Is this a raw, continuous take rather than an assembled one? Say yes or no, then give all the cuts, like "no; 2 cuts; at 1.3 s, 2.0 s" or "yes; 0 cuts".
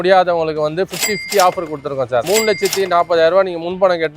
no; 1 cut; at 2.2 s